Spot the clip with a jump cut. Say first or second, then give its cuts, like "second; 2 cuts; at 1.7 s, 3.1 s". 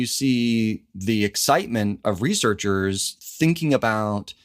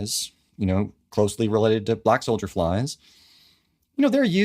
second; 1 cut; at 1.0 s